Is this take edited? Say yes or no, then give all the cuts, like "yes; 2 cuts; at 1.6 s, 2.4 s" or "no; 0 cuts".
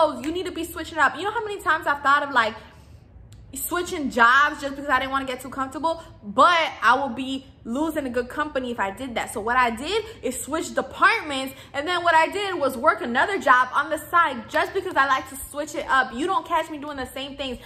no; 0 cuts